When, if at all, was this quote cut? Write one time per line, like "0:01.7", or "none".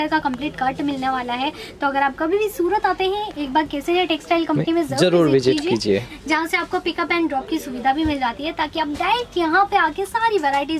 none